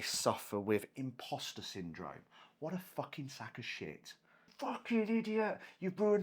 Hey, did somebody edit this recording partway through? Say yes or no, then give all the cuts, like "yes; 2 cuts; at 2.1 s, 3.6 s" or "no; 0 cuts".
yes; 1 cut; at 4.5 s